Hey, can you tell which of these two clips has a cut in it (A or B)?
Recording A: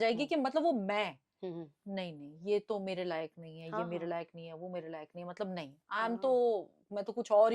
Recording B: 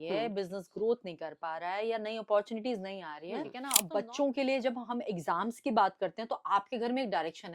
B